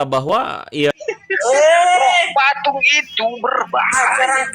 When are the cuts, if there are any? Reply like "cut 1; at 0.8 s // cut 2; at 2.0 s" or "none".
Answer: cut 1; at 0.9 s